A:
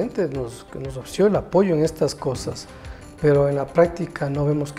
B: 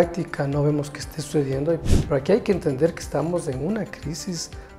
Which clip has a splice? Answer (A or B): B